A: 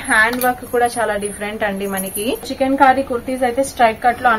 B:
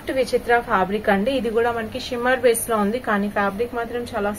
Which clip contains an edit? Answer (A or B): A